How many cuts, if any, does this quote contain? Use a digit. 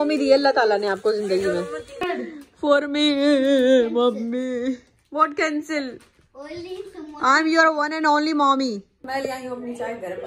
0